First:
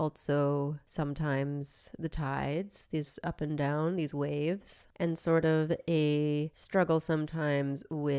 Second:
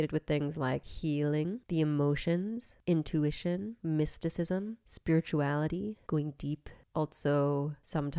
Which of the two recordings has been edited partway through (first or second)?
second